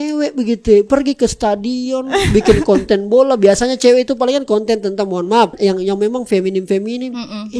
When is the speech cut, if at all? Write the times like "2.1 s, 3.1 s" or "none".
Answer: 5.6 s